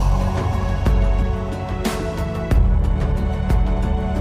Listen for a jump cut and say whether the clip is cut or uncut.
uncut